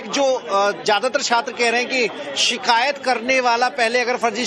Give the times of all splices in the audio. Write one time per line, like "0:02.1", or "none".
none